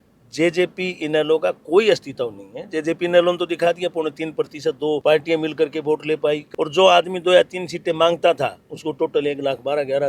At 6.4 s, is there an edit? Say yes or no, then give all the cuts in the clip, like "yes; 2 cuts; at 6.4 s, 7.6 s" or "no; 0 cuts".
yes; 2 cuts; at 5.0 s, 6.4 s